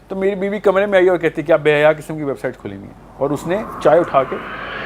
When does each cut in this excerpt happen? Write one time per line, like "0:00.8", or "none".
none